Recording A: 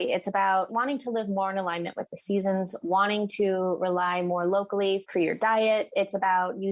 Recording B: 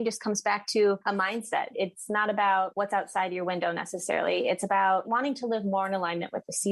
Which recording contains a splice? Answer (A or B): B